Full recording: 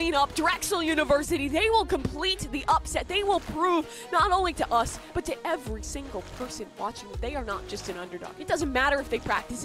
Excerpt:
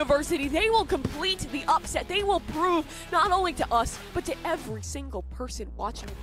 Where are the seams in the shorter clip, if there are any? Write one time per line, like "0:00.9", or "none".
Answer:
none

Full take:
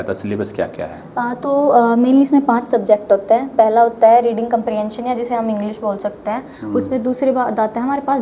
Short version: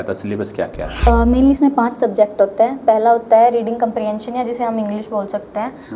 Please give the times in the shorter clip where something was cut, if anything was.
0:01.1

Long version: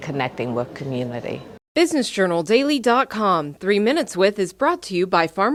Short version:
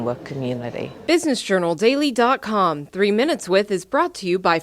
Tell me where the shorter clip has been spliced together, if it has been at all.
0:00.9

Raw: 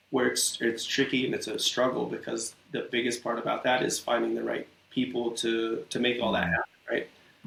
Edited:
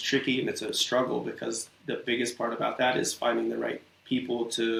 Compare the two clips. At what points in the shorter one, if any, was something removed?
none

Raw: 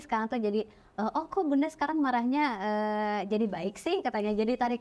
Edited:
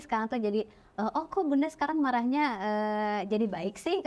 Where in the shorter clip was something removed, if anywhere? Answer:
none

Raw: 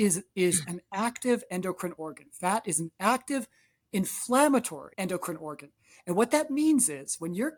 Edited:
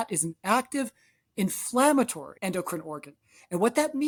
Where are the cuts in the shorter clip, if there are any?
none

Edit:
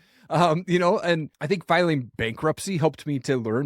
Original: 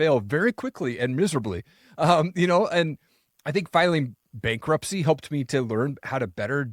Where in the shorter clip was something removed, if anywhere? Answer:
0:01.3
0:02.2

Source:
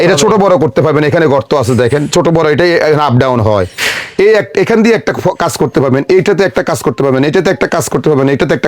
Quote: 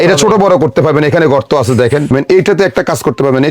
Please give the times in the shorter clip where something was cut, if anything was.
0:02.1

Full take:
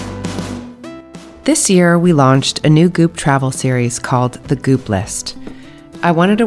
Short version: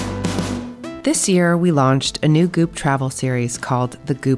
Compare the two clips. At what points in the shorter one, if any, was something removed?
0:01.0

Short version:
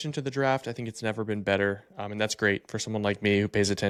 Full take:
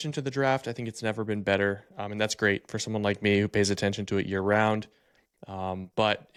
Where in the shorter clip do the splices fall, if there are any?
none

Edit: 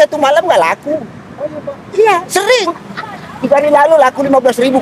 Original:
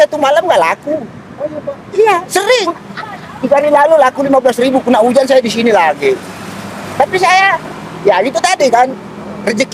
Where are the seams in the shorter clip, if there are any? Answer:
none

